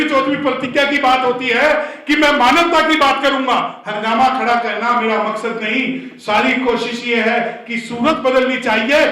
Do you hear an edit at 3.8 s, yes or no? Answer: yes